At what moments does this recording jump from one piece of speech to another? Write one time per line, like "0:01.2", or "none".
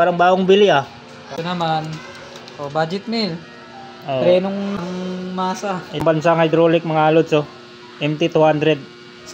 0:01.2
0:04.8
0:06.0